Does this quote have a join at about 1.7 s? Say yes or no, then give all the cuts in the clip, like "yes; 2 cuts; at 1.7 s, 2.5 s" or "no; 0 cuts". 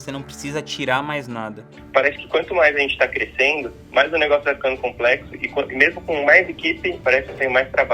yes; 3 cuts; at 1.7 s, 3.7 s, 7.0 s